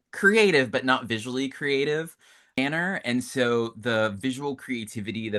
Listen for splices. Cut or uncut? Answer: uncut